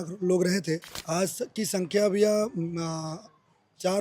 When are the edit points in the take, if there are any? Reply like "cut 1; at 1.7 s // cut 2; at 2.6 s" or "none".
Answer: cut 1; at 0.9 s